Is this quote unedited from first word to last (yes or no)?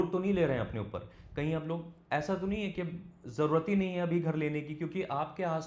yes